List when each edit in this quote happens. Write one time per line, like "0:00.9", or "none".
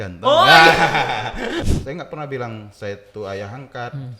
0:01.6